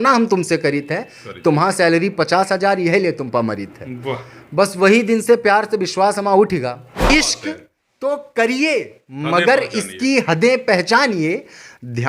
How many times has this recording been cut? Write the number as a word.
one